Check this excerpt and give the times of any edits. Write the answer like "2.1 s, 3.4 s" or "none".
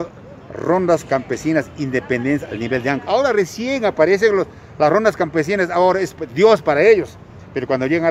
3.0 s

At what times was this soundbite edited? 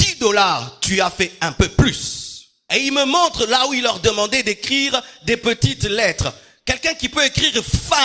2.6 s

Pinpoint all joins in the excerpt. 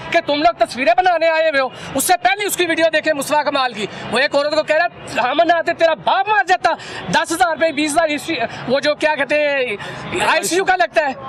none

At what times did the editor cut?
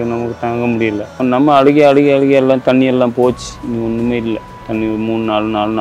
1.1 s, 4.6 s

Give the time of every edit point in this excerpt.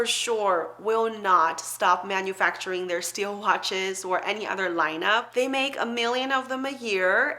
5.3 s

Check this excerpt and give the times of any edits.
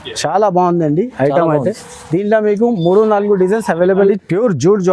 4.0 s

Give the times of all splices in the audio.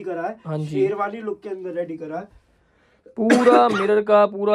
none

